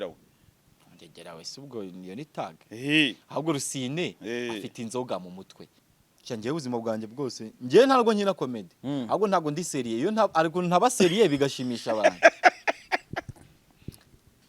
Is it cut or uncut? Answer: cut